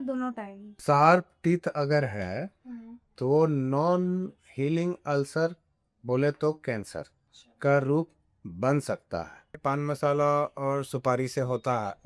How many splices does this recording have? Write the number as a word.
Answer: two